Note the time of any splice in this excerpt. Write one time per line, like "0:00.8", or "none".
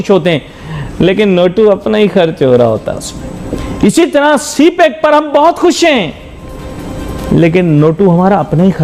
none